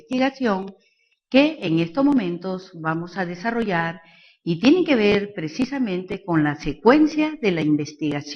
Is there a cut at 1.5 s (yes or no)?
no